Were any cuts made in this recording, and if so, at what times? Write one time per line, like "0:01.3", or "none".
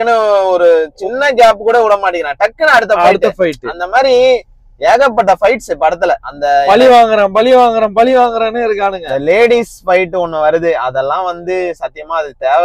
none